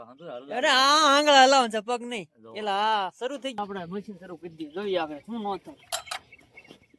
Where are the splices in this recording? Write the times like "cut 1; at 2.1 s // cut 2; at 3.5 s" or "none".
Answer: cut 1; at 3.5 s